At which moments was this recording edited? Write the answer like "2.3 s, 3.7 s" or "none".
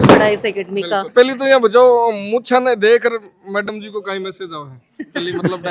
1.1 s